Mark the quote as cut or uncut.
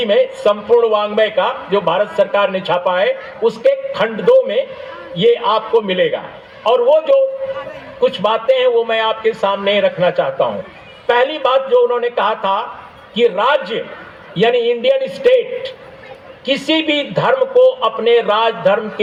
uncut